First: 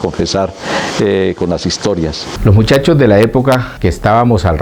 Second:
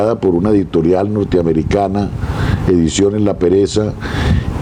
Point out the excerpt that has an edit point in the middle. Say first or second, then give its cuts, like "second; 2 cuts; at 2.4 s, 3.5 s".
first; 1 cut; at 2.2 s